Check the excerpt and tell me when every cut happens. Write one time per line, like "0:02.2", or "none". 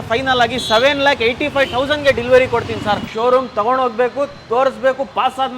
0:03.0